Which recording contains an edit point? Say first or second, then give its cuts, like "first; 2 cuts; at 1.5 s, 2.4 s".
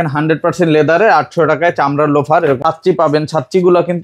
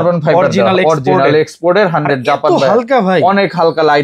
first; 1 cut; at 2.6 s